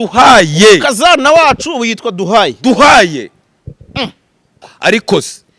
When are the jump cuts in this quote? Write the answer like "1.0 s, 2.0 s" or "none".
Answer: 4.7 s

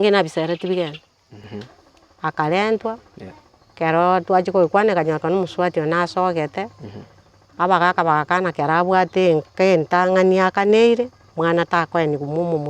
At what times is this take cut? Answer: 1.4 s

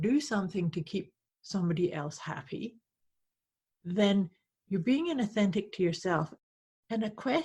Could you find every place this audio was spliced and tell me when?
6.3 s

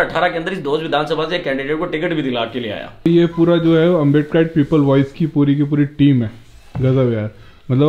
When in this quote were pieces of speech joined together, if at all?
2.8 s

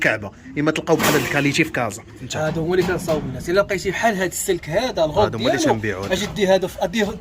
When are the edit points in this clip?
2.3 s

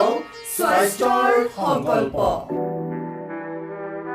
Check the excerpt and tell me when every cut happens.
2.4 s

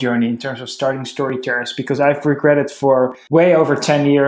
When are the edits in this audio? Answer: 3.2 s

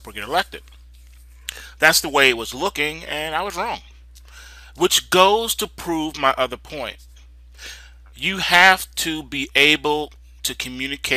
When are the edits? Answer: none

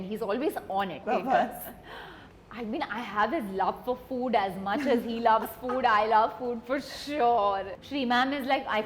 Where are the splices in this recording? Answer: 1.0 s, 7.8 s

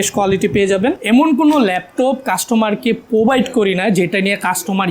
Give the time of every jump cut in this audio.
1.0 s

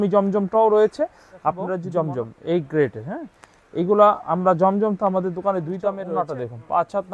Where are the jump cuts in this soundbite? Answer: 1.8 s, 6.0 s

